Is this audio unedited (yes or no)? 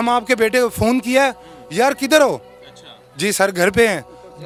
yes